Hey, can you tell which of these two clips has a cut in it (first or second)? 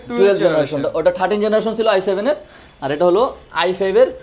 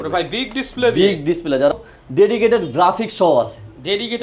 second